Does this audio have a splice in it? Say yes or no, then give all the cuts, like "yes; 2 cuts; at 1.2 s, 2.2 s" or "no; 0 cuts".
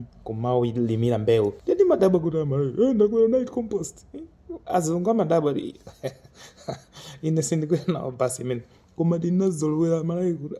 yes; 1 cut; at 1.6 s